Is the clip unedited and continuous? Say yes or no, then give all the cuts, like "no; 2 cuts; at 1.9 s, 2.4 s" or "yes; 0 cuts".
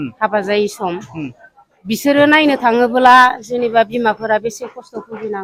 yes; 0 cuts